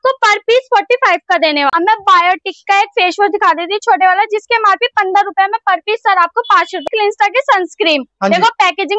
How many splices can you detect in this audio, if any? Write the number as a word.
two